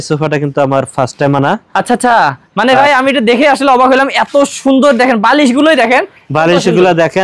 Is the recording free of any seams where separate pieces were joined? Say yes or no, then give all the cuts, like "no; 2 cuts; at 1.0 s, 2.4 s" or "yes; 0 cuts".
yes; 0 cuts